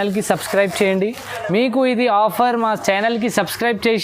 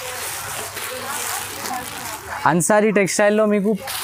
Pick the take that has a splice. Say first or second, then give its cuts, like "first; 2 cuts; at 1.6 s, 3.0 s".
first; 1 cut; at 1.3 s